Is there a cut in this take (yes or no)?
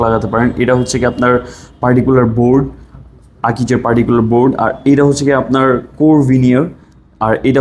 no